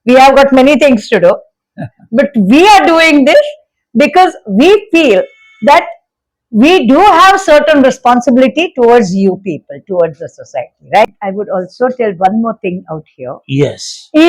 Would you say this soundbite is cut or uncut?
cut